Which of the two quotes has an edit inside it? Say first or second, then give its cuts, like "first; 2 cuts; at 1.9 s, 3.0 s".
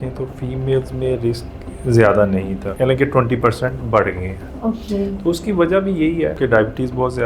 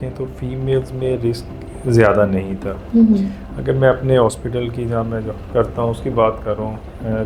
first; 2 cuts; at 2.6 s, 6.4 s